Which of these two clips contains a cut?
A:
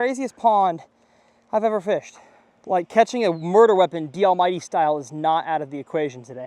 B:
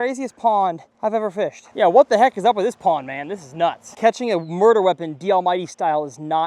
B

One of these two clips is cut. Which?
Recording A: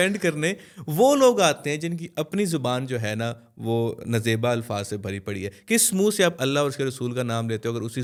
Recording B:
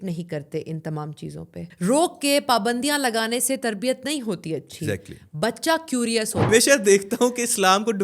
B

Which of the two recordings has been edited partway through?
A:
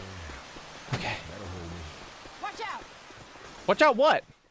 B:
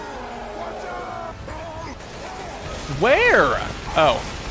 B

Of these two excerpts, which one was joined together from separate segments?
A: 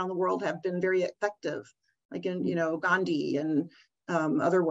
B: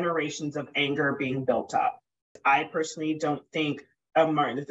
B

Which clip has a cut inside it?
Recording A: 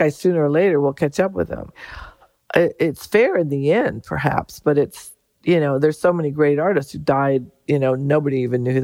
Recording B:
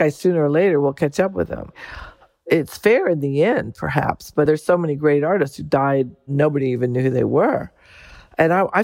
B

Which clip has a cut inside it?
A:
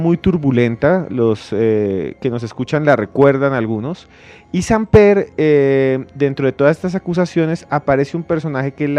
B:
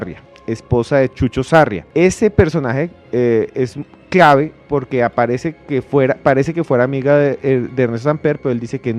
B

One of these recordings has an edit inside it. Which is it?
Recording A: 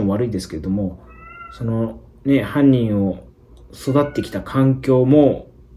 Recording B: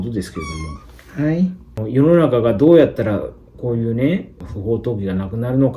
B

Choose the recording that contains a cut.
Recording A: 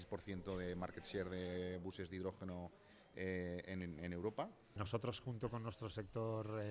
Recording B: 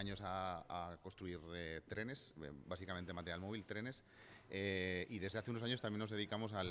A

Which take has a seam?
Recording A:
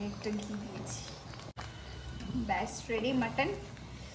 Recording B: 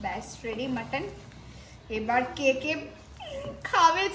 A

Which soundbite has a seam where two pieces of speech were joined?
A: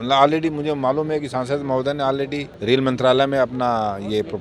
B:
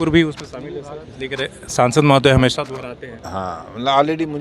A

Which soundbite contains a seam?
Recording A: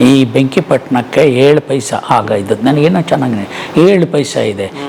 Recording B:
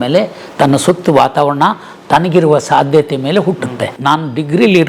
B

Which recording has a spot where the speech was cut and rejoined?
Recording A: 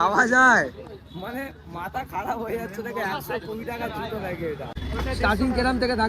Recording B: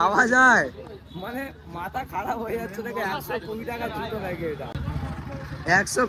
A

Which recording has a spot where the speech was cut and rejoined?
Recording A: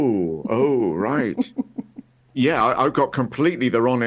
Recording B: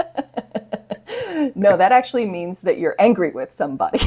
A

